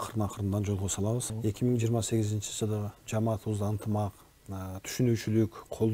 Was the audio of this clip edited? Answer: yes; 1 cut; at 1.3 s

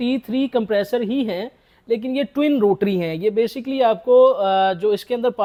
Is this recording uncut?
yes; 0 cuts

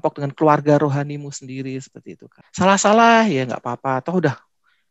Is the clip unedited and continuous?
no; 1 cut; at 2.4 s

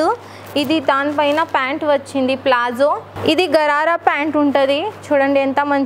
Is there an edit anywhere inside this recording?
yes; 1 cut; at 3.1 s

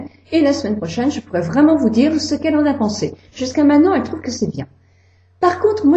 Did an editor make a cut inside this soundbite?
no; 0 cuts

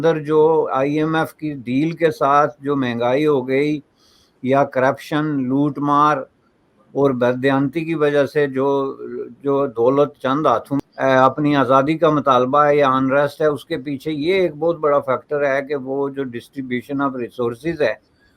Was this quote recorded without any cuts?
no; 1 cut; at 10.8 s

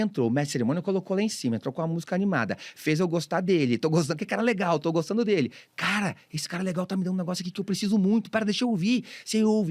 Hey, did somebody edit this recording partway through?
no; 0 cuts

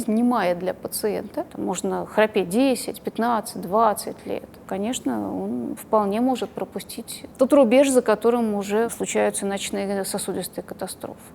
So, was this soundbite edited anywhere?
yes; 3 cuts; at 1.4 s, 4.6 s, 8.9 s

